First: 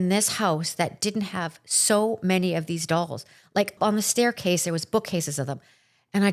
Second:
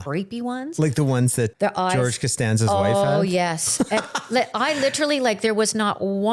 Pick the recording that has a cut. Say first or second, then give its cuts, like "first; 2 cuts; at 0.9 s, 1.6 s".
second; 1 cut; at 1.5 s